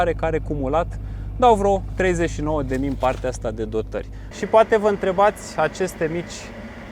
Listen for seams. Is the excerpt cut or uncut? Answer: cut